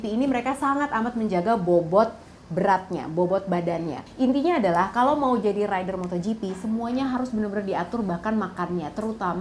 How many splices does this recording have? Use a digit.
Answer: 1